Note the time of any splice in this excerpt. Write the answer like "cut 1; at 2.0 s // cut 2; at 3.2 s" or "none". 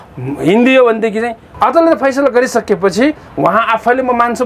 cut 1; at 1.4 s